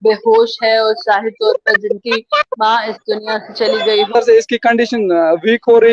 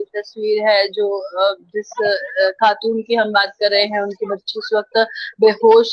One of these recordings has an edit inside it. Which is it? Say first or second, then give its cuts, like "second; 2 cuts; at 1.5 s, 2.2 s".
first; 1 cut; at 4.1 s